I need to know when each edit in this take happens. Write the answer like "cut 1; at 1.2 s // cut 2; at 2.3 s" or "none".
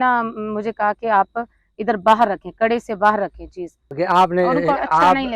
cut 1; at 3.8 s